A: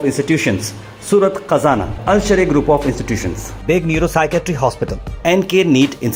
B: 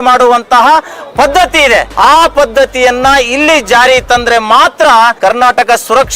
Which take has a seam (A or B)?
B